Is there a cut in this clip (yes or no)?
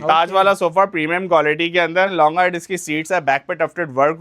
yes